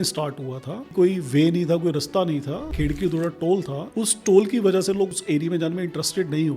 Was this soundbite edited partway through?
yes; 4 cuts; at 0.9 s, 2.7 s, 3.8 s, 5.1 s

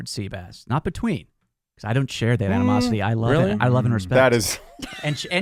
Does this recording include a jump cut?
no; 0 cuts

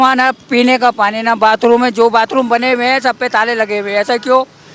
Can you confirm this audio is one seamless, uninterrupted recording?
yes; 0 cuts

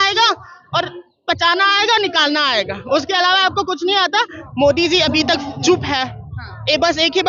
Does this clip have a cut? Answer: yes; 1 cut; at 4.4 s

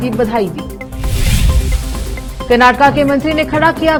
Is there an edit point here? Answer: no; 0 cuts

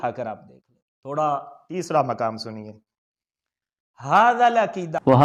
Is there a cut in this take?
no; 0 cuts

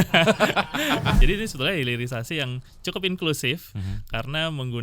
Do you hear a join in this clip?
yes; 1 cut; at 1.2 s

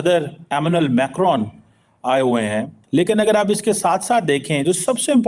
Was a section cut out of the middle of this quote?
yes; 1 cut; at 2.8 s

